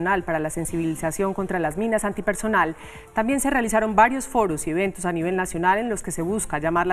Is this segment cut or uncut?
cut